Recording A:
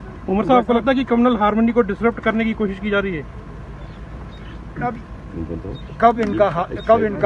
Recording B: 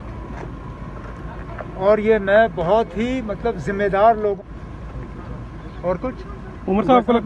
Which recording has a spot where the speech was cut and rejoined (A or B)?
B